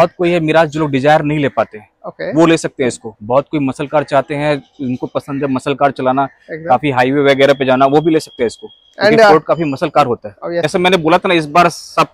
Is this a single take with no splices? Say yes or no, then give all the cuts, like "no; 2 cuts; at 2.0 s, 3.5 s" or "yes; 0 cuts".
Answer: no; 1 cut; at 10.7 s